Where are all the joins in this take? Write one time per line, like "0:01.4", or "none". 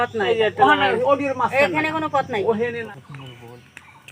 0:02.8